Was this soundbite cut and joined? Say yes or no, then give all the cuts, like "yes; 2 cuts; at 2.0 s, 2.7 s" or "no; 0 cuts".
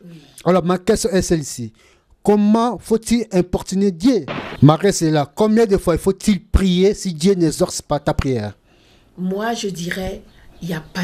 yes; 1 cut; at 4.4 s